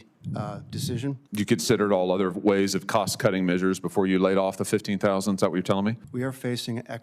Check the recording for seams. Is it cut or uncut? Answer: cut